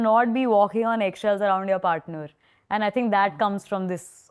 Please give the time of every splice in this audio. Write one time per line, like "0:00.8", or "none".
none